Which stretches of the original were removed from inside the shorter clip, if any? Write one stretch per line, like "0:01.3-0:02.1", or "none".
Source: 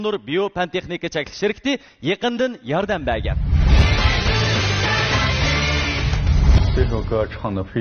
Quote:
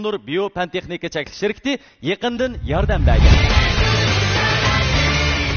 0:03.2-0:03.7